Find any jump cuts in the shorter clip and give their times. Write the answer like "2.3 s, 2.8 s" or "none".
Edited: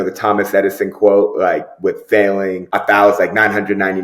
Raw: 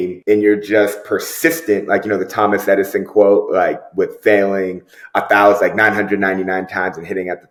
2.6 s